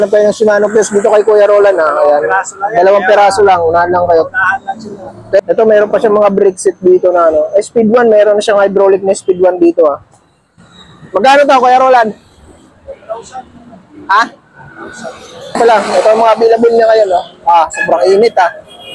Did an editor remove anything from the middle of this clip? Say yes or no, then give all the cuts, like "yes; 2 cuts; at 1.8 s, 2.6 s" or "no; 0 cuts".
yes; 2 cuts; at 5.4 s, 15.6 s